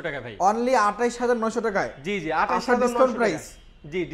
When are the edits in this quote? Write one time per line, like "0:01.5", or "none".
none